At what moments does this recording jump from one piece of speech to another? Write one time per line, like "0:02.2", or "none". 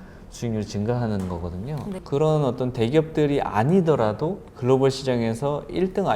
0:02.0
0:04.4